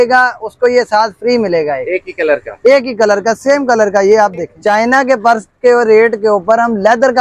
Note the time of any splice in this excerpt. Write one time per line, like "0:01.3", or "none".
0:04.5